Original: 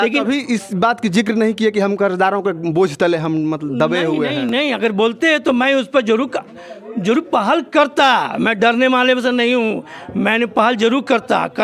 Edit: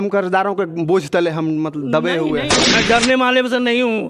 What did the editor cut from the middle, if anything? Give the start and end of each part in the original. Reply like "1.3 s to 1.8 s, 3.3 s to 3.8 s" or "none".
4.4 s to 8.3 s

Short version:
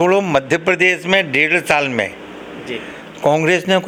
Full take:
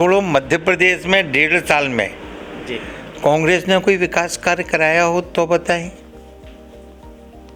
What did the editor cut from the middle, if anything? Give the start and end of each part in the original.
none

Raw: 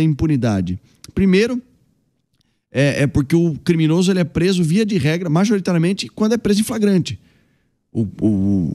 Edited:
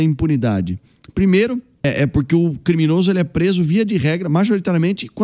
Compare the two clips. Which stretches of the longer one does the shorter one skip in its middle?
1.8 s to 2.9 s

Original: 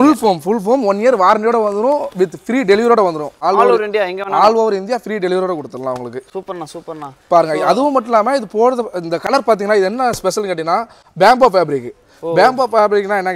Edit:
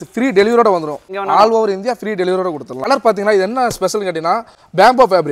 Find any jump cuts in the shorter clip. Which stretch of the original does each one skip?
3.4 s to 4.1 s, 5.9 s to 9.2 s

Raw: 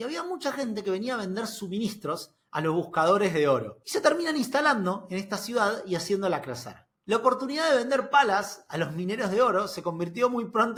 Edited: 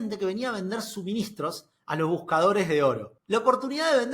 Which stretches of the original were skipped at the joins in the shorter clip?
3.8 s to 6.9 s

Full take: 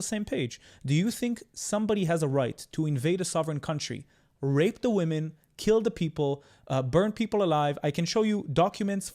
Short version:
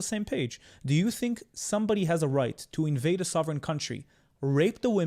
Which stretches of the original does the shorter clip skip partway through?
none

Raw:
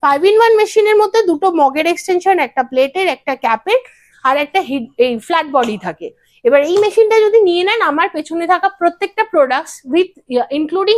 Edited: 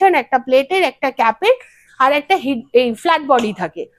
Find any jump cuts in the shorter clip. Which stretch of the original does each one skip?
none

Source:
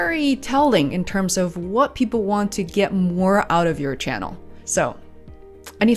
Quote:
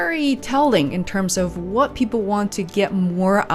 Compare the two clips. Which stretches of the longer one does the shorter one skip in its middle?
none

